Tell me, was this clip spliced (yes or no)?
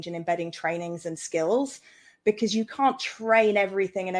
no